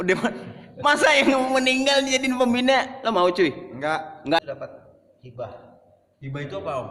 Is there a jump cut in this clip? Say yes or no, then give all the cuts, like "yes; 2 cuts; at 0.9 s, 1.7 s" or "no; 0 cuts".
yes; 1 cut; at 4.4 s